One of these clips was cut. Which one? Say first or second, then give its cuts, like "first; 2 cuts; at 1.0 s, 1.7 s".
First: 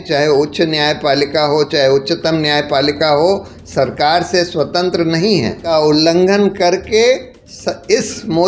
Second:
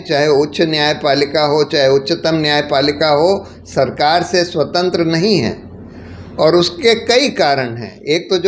first; 1 cut; at 5.7 s